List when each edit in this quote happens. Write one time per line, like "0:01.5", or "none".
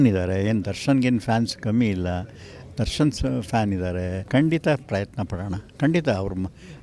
0:04.2